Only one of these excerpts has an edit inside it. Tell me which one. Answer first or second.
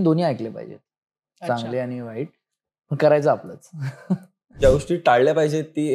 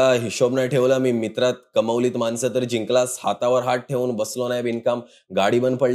first